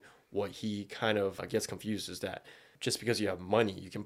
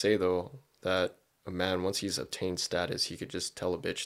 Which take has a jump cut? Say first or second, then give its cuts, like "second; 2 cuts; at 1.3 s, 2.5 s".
first; 2 cuts; at 1.4 s, 2.7 s